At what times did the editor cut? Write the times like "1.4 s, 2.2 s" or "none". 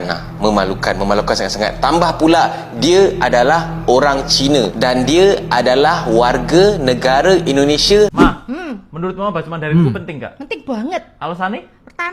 8.1 s